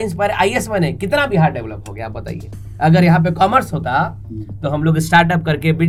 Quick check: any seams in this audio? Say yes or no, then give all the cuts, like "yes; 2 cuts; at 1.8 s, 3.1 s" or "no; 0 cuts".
no; 0 cuts